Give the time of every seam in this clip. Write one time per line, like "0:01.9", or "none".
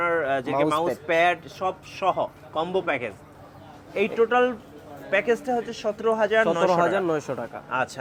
none